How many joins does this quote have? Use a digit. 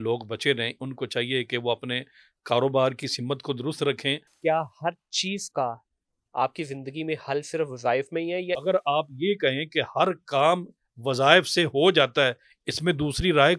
2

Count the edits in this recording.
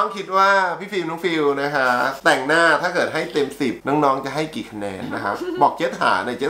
2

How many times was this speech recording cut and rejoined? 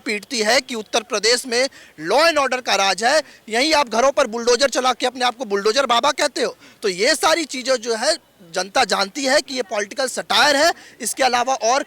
0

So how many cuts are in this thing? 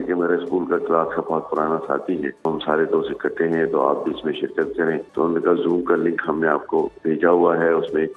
2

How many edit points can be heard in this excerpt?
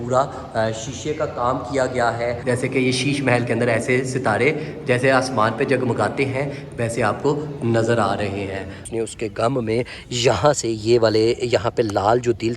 2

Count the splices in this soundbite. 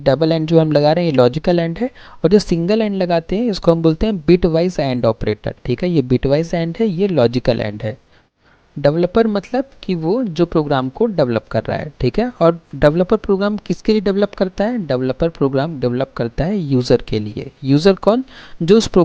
1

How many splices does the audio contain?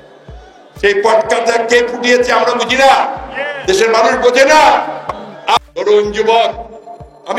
1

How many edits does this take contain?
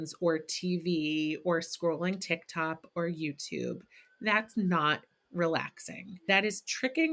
1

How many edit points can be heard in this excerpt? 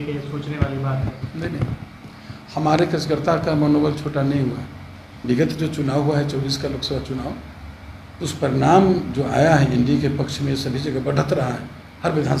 1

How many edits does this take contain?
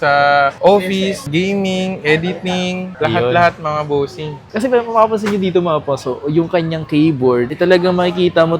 1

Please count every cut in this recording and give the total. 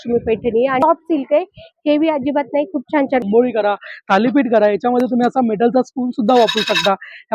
2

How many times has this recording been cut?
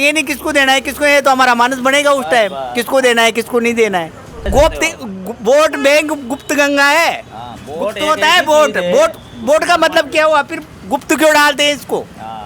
1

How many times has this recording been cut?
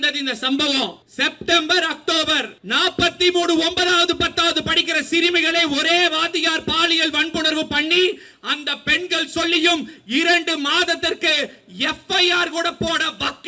2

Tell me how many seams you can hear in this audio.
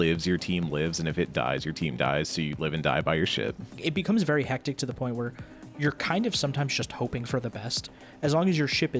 2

